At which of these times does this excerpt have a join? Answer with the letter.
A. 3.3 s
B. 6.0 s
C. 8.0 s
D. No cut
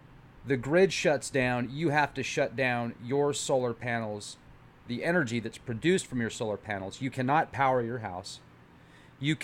B